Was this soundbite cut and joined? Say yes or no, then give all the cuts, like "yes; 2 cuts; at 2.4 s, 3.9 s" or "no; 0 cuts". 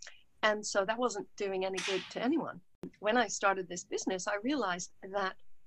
yes; 1 cut; at 2.9 s